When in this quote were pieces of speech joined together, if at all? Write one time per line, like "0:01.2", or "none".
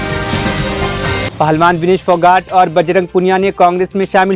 none